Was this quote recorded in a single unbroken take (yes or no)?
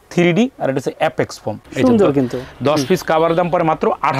no